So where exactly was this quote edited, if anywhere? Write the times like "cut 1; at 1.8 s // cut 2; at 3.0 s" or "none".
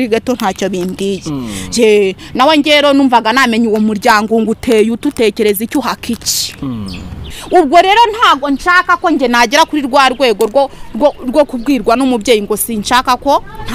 cut 1; at 7.4 s